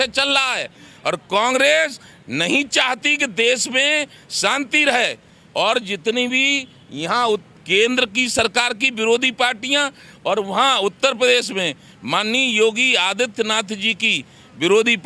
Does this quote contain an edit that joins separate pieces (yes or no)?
no